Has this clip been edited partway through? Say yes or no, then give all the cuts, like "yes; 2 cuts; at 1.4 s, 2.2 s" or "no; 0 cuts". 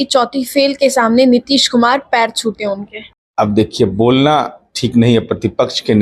no; 0 cuts